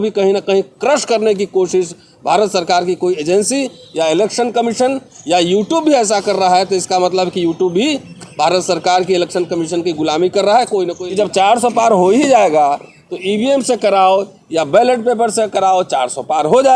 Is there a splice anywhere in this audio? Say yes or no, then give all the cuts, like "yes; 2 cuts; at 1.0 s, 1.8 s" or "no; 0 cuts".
yes; 1 cut; at 11.0 s